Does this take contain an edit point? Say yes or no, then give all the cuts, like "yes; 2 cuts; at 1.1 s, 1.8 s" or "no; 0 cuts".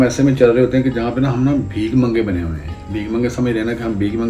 no; 0 cuts